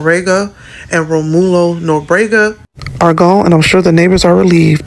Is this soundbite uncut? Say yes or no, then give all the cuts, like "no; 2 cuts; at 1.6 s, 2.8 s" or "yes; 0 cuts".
yes; 0 cuts